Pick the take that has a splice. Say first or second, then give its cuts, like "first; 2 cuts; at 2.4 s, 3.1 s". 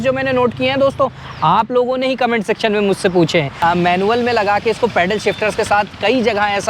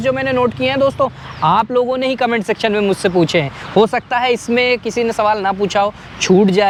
first; 1 cut; at 3.5 s